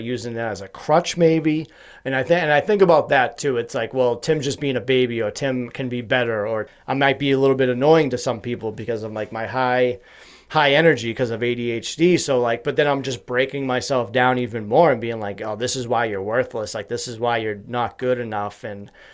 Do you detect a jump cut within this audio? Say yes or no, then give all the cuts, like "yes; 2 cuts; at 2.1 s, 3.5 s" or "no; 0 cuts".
yes; 1 cut; at 6.7 s